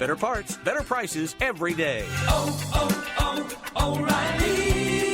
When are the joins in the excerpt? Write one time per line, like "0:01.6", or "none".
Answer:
0:02.1